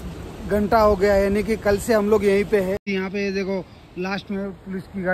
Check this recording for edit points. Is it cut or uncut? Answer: cut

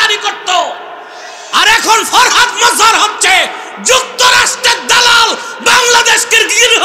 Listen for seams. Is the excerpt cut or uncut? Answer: uncut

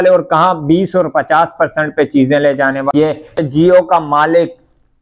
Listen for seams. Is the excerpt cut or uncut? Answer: cut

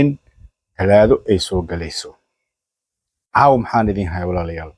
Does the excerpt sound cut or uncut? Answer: uncut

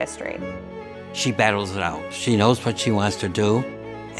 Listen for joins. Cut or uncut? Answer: cut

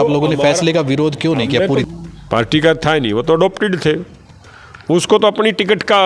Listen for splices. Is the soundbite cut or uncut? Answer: cut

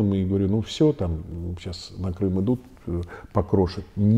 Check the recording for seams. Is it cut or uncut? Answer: uncut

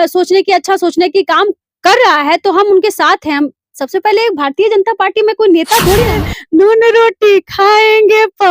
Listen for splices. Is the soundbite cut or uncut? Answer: cut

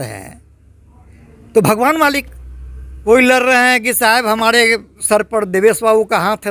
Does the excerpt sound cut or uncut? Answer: cut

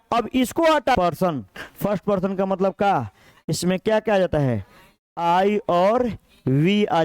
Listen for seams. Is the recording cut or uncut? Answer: cut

